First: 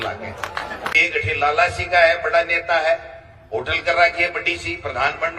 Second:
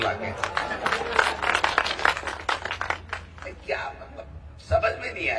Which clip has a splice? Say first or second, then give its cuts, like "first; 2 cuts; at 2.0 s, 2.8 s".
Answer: first; 1 cut; at 1.0 s